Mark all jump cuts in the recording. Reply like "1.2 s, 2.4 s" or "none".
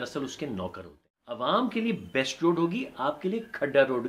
1.4 s